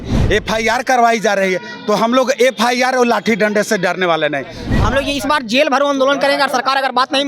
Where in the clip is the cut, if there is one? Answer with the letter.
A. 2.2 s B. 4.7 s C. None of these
B